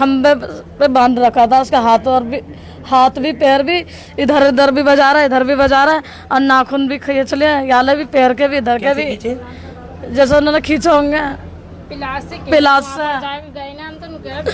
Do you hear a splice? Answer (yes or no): no